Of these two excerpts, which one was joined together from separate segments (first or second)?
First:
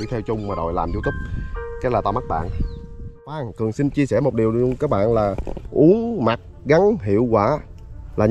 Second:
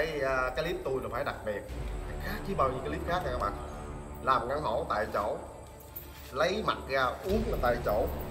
first